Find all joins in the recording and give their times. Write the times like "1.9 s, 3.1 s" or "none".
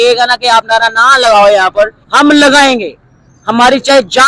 2.0 s

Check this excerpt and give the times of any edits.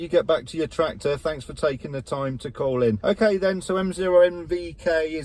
3.0 s

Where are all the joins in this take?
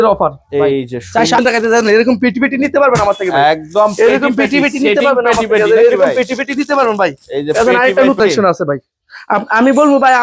1.4 s, 8.2 s

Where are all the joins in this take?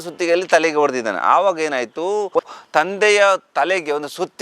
2.4 s

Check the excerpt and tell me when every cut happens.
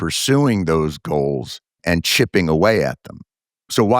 1.8 s

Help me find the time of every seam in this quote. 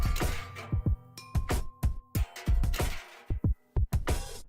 2.8 s

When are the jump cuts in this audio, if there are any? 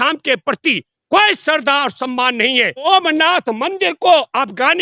2.9 s

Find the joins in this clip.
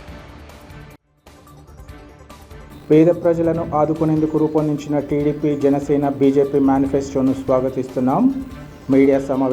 2.2 s

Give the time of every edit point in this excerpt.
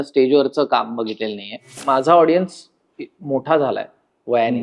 1.8 s

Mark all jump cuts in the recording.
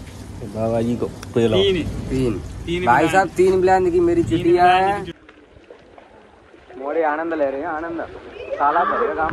5.1 s

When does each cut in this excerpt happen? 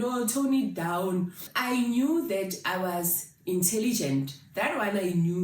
1.4 s

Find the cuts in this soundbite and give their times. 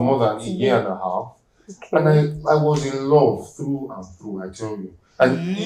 none

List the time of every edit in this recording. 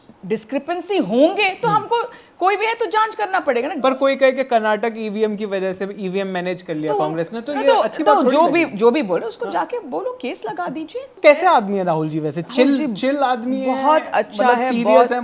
3.8 s, 11.2 s

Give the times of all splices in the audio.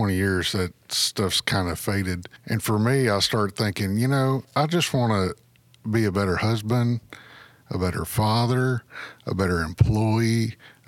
2.3 s, 4.5 s

